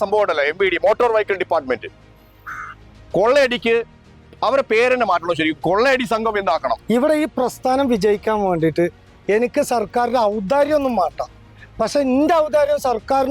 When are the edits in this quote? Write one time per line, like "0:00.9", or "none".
0:06.8